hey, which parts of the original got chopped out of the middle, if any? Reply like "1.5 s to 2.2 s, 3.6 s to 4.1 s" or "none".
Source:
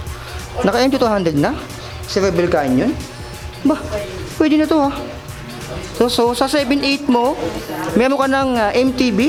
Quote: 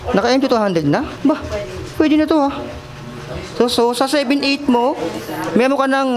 1.6 s to 3.5 s